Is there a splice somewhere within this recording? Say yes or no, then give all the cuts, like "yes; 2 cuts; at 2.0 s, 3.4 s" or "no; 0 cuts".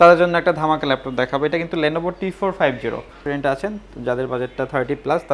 yes; 1 cut; at 3.2 s